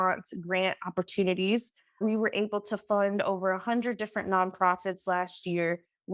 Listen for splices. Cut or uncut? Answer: uncut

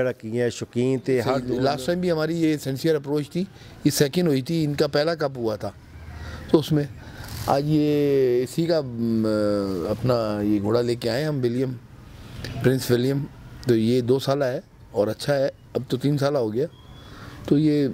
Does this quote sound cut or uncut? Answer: cut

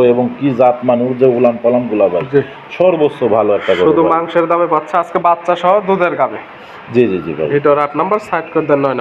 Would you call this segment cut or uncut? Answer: uncut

